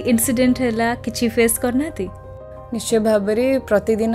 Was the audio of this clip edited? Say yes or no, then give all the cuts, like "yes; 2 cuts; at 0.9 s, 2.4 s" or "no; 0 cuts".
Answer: no; 0 cuts